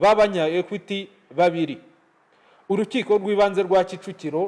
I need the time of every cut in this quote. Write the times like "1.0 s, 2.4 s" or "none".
none